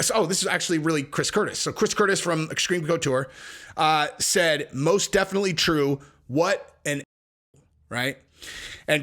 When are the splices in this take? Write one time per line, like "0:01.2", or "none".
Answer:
0:07.2